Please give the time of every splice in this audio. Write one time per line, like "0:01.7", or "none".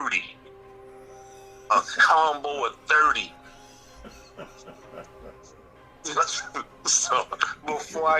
none